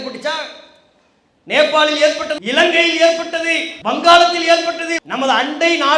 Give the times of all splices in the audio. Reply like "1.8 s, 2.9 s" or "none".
2.4 s, 3.7 s, 4.9 s

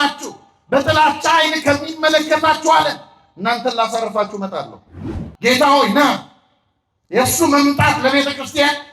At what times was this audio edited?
5.2 s

